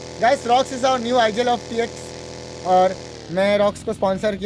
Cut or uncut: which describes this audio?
uncut